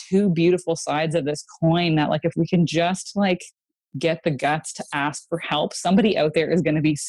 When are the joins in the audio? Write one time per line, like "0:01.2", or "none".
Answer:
none